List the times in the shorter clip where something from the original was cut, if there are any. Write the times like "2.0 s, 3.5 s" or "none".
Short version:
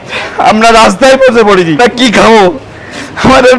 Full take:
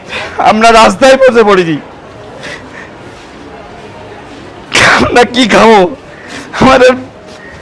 1.8 s